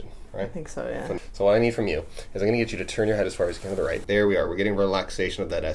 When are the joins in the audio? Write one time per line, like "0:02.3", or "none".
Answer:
0:01.2
0:04.0